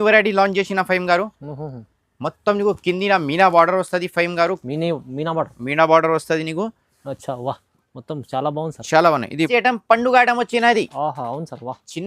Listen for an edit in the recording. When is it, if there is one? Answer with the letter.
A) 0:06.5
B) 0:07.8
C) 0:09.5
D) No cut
C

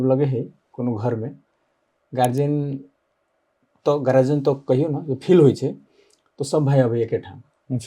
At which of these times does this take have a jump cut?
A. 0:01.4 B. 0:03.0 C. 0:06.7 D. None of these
D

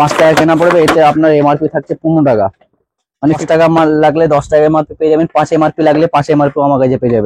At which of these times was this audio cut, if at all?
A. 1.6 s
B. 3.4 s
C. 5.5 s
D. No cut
B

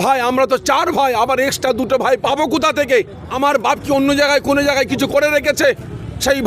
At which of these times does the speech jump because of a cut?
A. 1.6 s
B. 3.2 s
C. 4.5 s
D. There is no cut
B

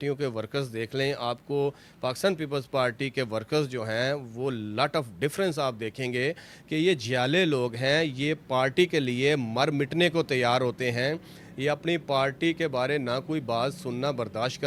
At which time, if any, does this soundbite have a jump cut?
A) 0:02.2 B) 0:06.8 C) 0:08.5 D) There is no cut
D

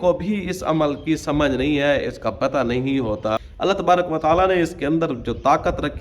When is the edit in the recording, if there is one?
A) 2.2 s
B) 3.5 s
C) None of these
B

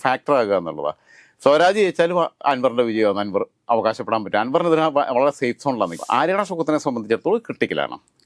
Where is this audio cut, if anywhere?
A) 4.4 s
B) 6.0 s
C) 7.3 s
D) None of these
B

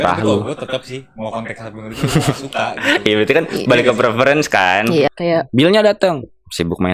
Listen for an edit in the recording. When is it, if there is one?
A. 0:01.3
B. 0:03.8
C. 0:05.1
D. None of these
C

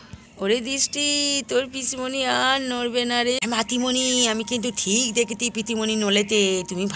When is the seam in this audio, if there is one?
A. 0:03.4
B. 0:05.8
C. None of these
A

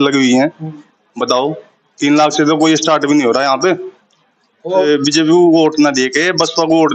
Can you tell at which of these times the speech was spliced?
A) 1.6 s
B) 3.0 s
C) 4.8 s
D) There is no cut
C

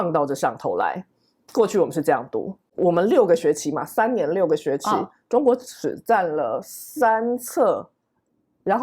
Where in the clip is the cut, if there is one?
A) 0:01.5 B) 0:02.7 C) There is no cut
B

